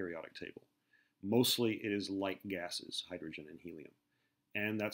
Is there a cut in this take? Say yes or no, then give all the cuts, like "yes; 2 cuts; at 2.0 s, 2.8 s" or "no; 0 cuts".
no; 0 cuts